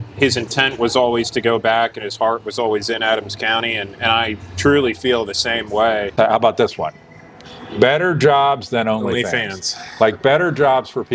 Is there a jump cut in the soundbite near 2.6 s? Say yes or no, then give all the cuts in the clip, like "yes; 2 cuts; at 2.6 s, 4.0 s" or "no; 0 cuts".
no; 1 cut; at 6.1 s